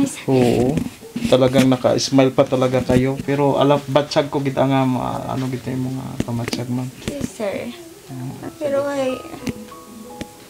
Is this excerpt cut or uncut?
cut